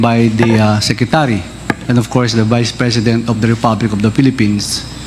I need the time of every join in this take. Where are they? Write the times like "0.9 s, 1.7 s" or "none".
none